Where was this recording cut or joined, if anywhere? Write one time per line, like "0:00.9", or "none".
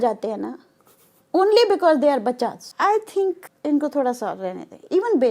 0:02.6
0:03.5